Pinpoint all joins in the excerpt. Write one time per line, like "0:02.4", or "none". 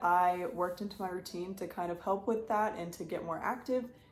none